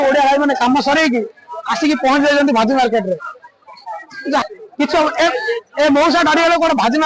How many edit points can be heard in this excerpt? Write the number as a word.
one